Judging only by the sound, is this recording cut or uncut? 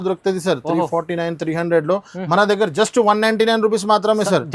uncut